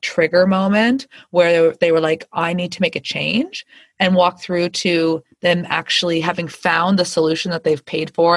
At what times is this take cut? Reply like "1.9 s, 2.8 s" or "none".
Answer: none

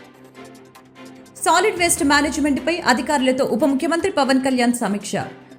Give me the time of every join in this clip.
1.4 s

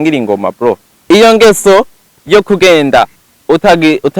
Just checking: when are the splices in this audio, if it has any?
0.9 s

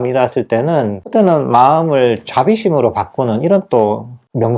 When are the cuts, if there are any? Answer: 1.0 s

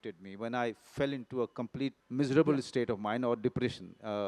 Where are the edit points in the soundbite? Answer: 2.0 s

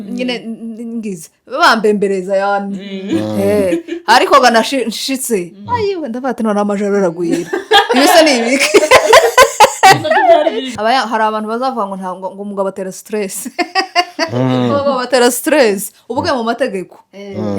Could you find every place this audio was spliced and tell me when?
10.7 s

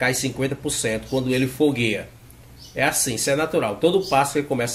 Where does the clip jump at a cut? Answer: none

